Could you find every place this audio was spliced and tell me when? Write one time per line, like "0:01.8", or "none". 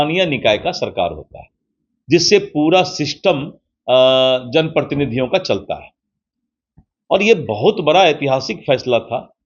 none